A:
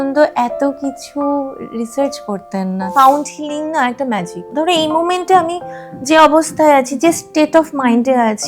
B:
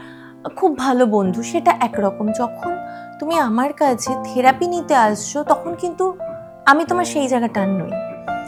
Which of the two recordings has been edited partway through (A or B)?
A